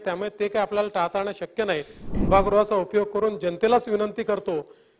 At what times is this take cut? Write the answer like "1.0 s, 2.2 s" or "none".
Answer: 2.3 s